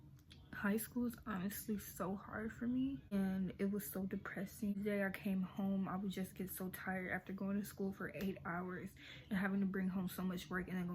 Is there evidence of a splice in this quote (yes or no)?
yes